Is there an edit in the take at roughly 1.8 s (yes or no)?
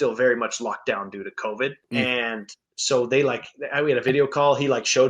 yes